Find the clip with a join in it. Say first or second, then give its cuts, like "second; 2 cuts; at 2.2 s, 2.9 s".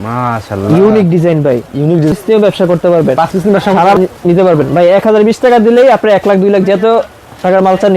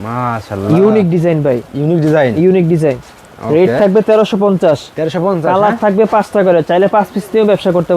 first; 2 cuts; at 2.1 s, 4.0 s